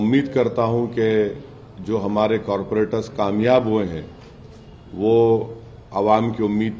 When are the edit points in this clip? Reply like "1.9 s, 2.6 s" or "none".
none